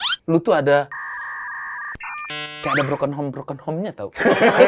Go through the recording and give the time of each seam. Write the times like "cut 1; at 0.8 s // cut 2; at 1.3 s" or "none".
none